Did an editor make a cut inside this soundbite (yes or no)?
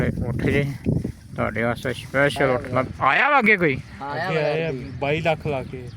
yes